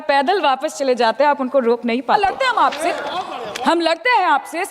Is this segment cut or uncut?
cut